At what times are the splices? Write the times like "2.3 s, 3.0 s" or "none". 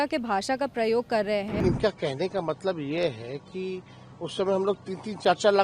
1.6 s